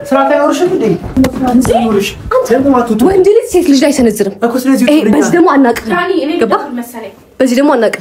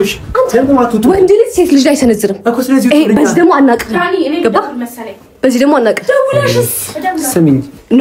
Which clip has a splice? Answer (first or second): first